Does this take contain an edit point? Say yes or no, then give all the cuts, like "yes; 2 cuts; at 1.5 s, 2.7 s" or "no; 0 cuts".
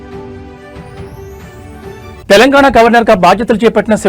yes; 1 cut; at 2.2 s